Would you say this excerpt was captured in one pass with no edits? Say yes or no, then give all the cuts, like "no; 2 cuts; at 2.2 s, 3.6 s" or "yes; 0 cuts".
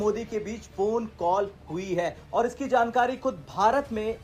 yes; 0 cuts